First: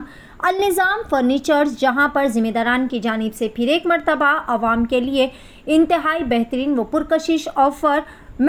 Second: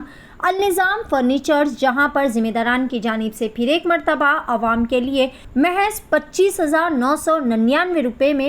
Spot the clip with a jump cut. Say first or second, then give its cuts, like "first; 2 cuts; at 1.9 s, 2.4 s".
second; 1 cut; at 5.4 s